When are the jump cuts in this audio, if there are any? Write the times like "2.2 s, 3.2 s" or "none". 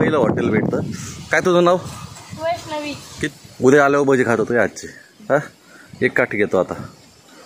3.2 s